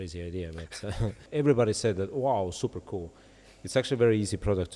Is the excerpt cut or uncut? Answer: cut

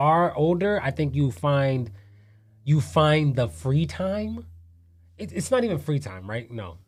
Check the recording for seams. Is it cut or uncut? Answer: uncut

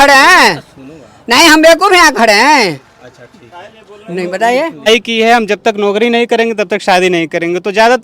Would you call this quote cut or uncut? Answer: cut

